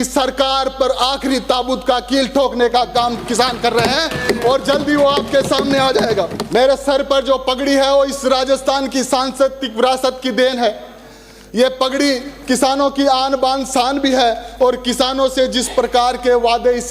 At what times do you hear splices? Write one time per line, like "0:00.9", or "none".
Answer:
0:06.4